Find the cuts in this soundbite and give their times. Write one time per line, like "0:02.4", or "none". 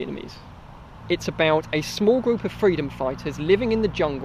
0:01.0